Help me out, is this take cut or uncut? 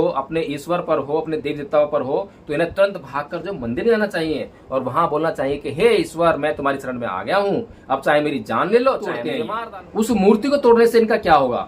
cut